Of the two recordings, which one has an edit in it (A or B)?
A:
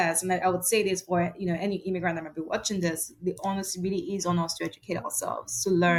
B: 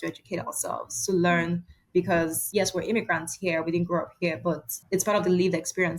B